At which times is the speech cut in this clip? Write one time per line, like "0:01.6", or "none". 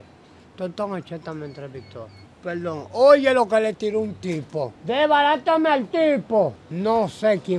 0:02.2
0:04.8
0:06.6